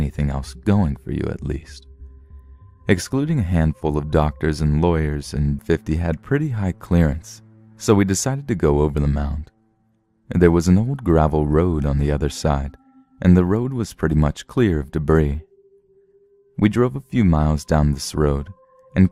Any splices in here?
no; 0 cuts

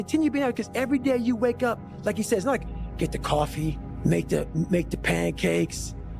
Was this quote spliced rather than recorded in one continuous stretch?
yes; 1 cut; at 3.9 s

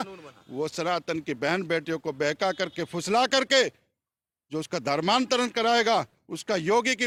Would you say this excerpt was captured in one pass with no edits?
yes; 0 cuts

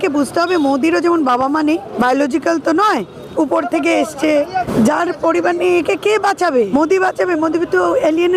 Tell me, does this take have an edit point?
yes; 3 cuts; at 1.9 s, 4.7 s, 6.7 s

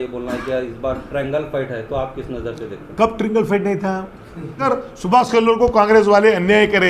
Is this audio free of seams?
no; 1 cut; at 4.7 s

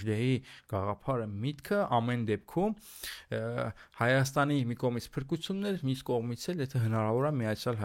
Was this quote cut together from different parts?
no; 0 cuts

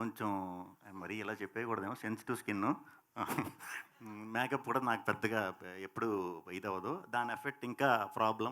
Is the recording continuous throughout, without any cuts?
yes; 0 cuts

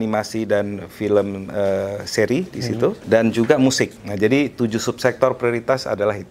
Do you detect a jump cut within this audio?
yes; 2 cuts; at 3.0 s, 4.0 s

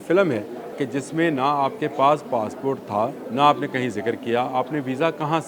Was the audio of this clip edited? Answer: yes; 2 cuts; at 0.8 s, 3.2 s

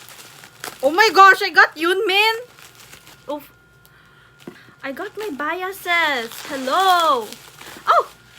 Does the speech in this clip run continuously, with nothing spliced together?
no; 1 cut; at 4.7 s

